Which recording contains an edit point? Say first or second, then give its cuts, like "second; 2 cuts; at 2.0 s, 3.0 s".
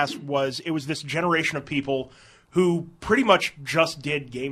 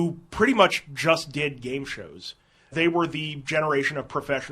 second; 1 cut; at 2.7 s